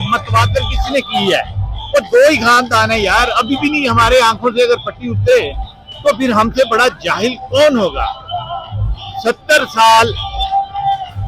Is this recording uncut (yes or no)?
yes